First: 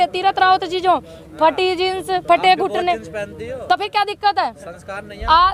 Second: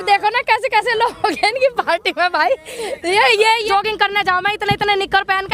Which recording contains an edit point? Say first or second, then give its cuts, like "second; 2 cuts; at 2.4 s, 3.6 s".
second; 1 cut; at 3.7 s